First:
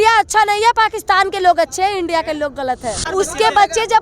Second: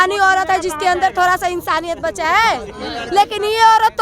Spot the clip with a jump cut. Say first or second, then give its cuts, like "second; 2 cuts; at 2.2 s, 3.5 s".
first; 1 cut; at 2.9 s